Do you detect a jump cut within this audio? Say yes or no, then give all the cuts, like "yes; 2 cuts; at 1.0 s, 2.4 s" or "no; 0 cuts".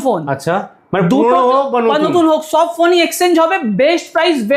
no; 0 cuts